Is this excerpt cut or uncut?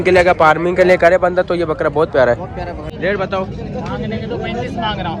cut